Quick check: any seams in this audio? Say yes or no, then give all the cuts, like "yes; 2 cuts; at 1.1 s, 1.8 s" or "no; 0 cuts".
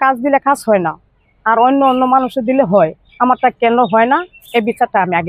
no; 0 cuts